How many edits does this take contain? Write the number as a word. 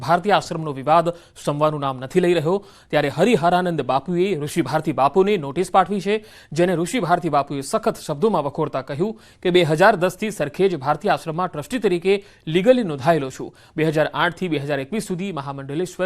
one